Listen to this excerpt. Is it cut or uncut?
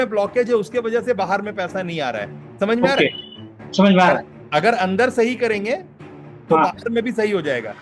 cut